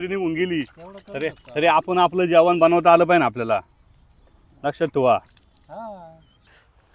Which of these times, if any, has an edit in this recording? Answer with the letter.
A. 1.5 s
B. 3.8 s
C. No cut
C